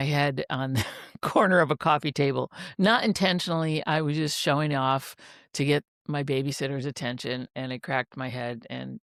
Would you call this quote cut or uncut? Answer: uncut